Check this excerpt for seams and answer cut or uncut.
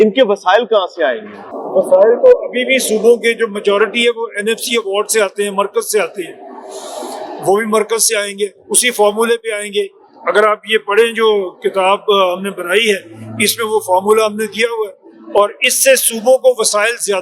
uncut